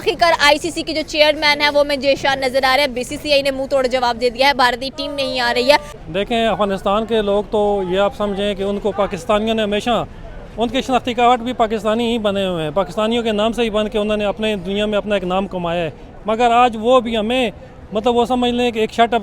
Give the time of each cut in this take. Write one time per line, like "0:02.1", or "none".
0:05.9